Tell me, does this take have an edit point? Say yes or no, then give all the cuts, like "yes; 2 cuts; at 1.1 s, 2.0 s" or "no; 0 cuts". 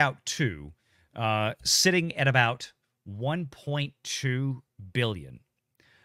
no; 0 cuts